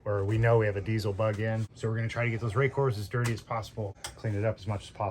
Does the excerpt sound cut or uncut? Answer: cut